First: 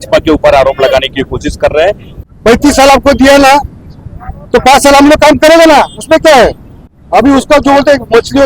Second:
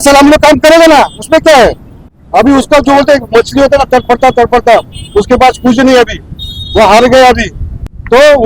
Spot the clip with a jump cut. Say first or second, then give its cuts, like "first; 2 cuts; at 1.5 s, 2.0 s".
first; 1 cut; at 2.1 s